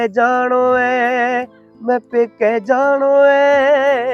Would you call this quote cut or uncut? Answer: uncut